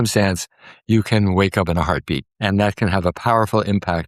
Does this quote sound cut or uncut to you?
cut